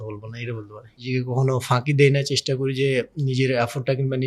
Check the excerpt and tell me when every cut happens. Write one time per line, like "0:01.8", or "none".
0:01.1